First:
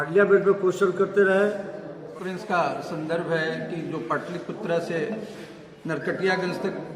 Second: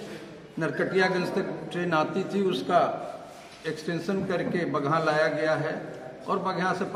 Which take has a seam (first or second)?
first